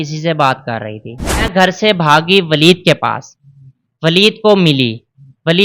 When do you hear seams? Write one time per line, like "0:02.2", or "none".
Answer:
0:01.5